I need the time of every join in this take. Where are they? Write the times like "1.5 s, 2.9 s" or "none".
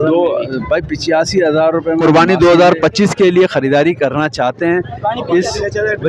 2.0 s